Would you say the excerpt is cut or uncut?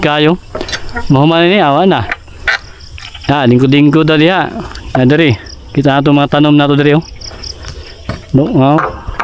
uncut